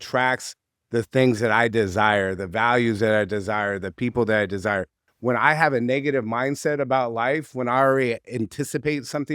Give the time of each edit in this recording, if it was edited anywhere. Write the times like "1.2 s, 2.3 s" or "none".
5.0 s